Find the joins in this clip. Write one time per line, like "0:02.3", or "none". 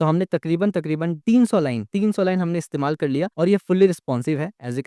none

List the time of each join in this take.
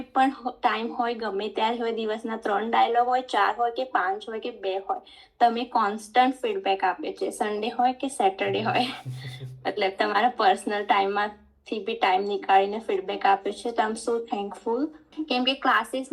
0:15.1

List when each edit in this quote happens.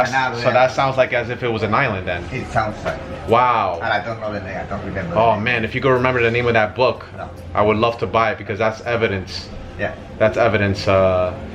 none

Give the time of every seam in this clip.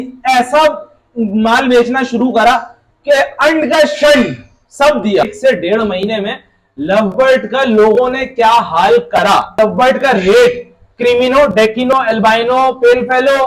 0:05.3
0:09.5

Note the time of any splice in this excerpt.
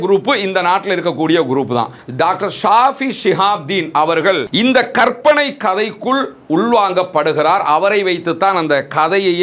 0:02.0

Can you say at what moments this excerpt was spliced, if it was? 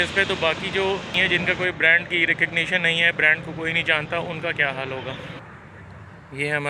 0:01.2
0:05.4

